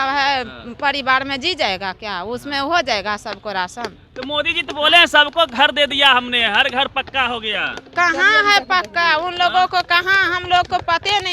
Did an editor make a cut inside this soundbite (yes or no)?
no